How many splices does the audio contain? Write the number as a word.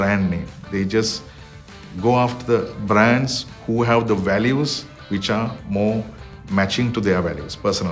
zero